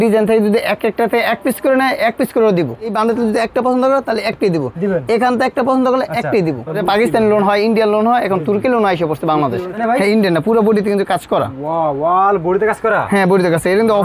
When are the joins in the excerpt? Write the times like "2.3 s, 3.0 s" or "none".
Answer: 2.9 s, 6.8 s, 9.8 s